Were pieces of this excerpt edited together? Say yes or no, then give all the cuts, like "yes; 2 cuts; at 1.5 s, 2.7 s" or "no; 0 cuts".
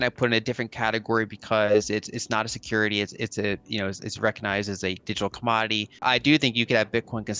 yes; 1 cut; at 6.0 s